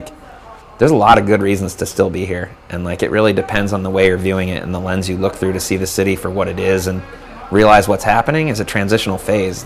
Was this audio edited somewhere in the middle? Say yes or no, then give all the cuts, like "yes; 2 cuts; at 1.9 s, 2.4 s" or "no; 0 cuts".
no; 0 cuts